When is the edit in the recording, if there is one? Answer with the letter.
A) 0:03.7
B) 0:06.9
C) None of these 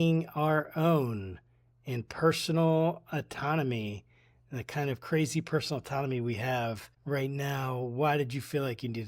B